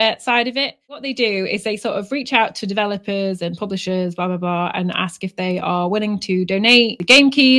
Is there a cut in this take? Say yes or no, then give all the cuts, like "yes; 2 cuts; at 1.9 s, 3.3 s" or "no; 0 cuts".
yes; 1 cut; at 1.0 s